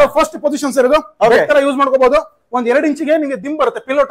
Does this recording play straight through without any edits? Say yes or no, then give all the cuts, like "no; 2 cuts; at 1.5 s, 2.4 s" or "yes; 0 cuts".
yes; 0 cuts